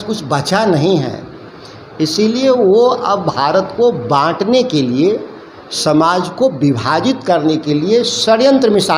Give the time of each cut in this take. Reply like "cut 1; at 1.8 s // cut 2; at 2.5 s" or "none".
none